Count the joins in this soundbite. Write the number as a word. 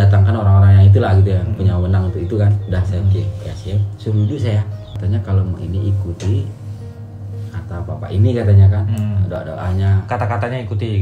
one